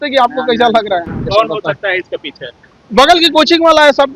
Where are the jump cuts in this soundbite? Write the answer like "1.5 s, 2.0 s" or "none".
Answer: 1.2 s